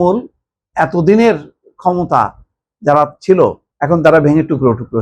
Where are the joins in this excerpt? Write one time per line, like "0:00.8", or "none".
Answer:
0:03.7